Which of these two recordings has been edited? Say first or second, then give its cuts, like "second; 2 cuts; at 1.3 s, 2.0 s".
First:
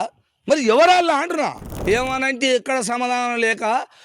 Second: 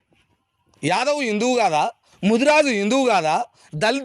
first; 1 cut; at 1.7 s